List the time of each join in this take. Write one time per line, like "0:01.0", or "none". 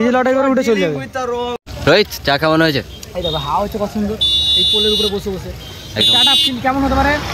0:01.6